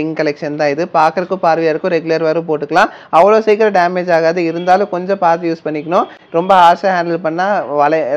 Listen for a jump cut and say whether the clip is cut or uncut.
uncut